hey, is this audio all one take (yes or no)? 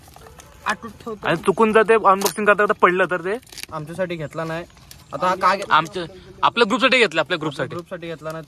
no